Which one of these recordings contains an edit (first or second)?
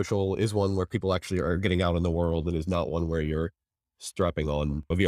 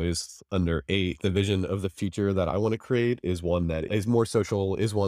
second